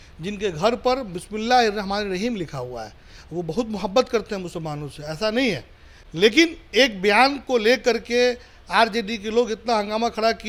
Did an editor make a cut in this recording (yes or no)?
no